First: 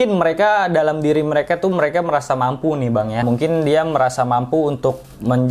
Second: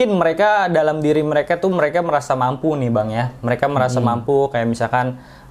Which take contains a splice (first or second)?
first